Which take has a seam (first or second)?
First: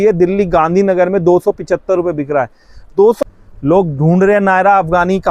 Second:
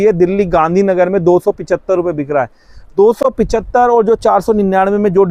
first